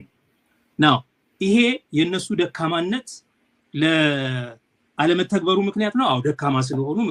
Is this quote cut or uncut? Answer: uncut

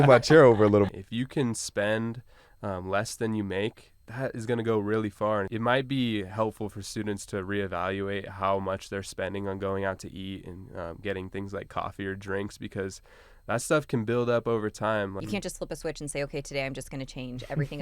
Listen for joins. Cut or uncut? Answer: cut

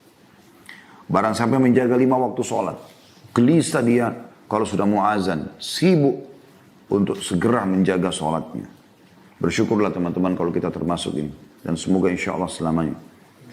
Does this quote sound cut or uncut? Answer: uncut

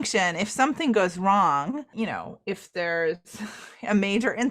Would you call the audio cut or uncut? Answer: cut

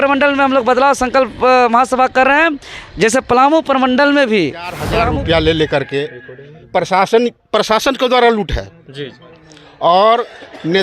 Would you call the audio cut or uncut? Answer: cut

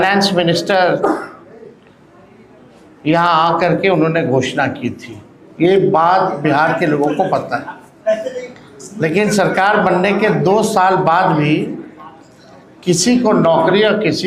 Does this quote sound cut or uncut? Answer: uncut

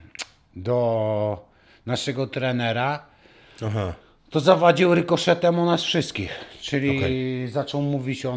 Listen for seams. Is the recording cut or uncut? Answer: uncut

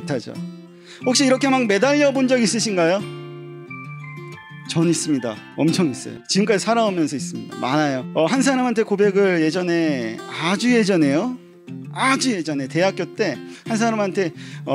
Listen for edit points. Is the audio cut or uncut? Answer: cut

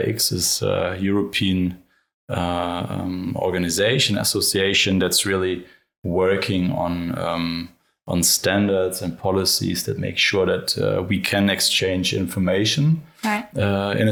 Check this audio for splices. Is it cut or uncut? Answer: uncut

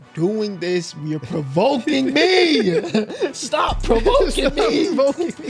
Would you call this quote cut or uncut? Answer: uncut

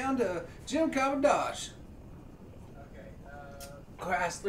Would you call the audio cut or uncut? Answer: uncut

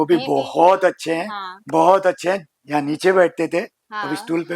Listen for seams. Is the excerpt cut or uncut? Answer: cut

